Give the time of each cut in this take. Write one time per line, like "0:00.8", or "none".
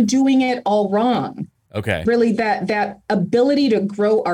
none